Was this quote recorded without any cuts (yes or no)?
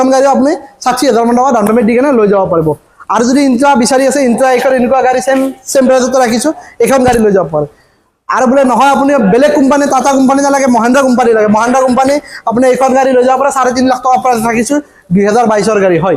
yes